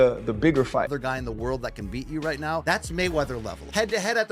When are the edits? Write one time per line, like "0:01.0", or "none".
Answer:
0:00.9